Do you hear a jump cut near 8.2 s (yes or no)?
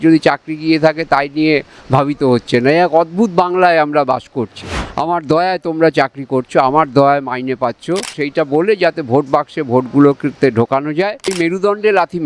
yes